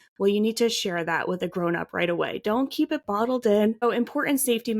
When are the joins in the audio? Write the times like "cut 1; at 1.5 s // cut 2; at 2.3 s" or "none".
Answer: cut 1; at 3.8 s